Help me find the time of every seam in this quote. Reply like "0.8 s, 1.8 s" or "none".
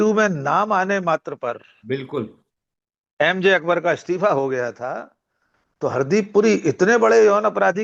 none